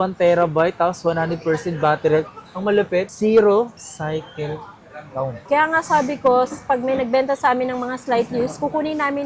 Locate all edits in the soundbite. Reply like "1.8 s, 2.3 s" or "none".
5.4 s